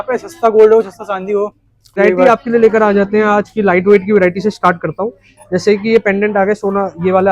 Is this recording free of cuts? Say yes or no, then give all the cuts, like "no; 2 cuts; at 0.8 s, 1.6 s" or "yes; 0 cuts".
no; 1 cut; at 2.0 s